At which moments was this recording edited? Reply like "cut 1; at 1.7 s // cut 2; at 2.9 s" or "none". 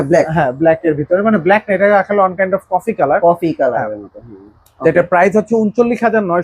none